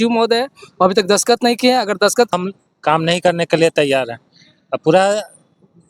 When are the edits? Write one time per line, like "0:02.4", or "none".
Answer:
0:02.3